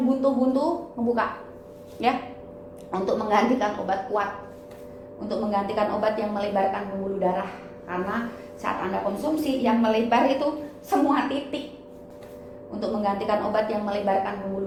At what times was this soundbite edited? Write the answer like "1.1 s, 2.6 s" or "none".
none